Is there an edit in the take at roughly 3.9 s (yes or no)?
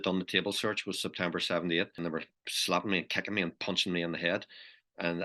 no